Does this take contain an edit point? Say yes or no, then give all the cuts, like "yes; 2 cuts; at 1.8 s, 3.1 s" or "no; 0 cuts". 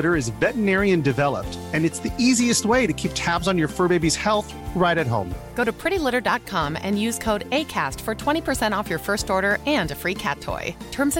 no; 0 cuts